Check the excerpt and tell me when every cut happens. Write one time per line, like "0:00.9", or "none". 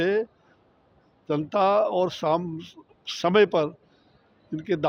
none